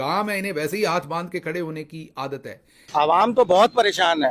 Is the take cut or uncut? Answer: cut